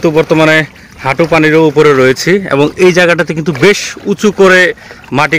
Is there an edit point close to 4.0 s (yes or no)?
no